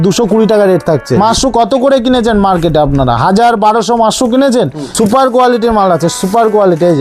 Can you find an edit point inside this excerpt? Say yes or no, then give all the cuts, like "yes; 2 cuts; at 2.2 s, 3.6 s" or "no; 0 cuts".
yes; 2 cuts; at 1.1 s, 4.8 s